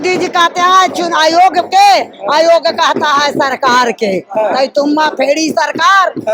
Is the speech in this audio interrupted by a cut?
no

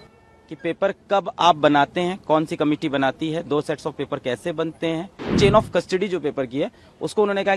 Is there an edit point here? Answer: yes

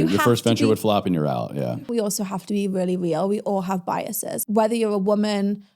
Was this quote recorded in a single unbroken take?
no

